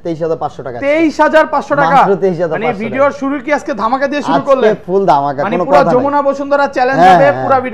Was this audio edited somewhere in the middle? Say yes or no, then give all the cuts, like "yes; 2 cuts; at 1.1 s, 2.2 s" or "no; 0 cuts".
no; 0 cuts